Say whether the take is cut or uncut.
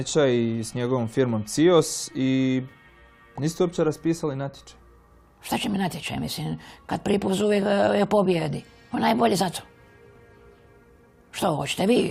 uncut